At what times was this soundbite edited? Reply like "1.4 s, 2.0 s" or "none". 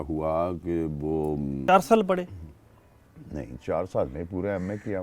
1.6 s